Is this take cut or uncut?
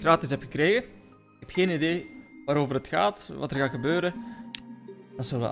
cut